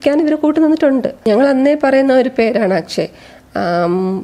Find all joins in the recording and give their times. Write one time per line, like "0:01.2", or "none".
0:01.2